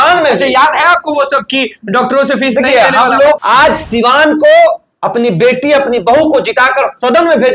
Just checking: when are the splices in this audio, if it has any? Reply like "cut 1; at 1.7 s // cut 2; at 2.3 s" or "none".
cut 1; at 3.4 s